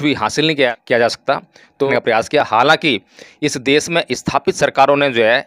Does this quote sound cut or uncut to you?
cut